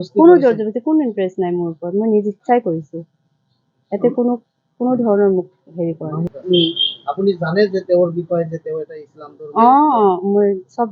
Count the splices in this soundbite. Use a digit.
0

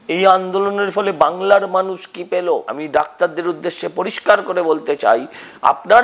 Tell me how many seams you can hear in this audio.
1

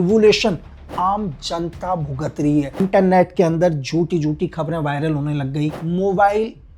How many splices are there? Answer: 2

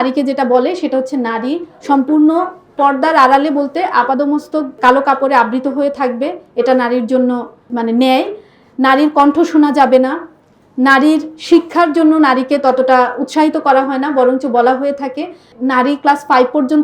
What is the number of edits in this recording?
2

